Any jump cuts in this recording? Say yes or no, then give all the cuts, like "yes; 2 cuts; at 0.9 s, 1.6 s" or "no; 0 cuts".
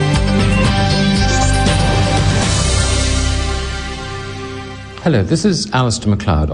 yes; 1 cut; at 3.4 s